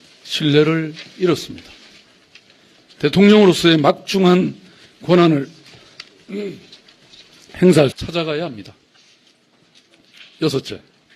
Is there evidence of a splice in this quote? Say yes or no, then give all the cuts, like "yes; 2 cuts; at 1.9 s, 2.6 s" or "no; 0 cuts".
no; 0 cuts